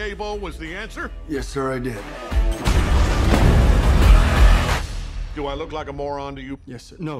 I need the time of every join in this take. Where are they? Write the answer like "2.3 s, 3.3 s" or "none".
4.9 s